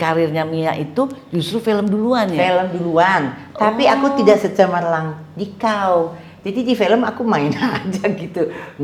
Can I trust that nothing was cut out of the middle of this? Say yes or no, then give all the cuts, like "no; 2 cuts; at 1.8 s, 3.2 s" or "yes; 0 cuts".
yes; 0 cuts